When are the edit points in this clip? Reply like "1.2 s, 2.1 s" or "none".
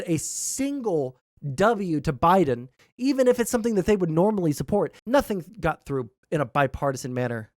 5.0 s

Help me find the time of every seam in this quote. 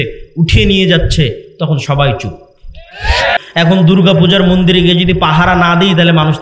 3.4 s

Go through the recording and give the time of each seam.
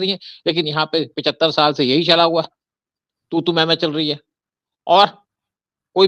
none

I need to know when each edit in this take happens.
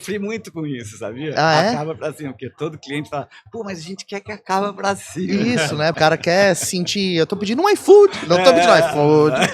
6.0 s

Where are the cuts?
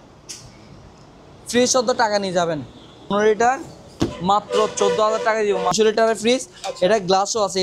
3.1 s, 5.7 s

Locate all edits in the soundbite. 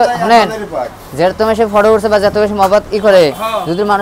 none

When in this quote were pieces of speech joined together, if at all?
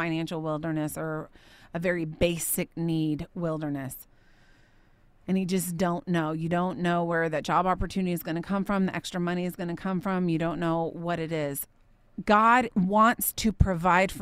12.7 s

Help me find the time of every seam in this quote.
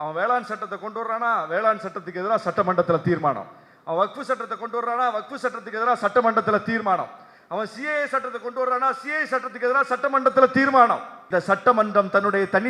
11.1 s

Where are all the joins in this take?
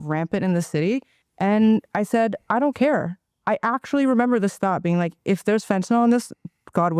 1.2 s

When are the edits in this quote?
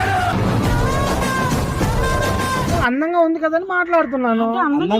2.8 s

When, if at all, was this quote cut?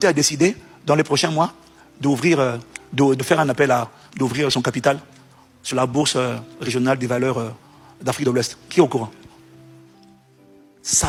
none

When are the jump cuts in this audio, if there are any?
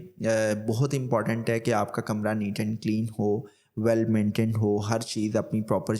none

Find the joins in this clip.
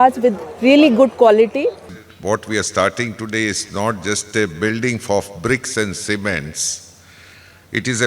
1.8 s

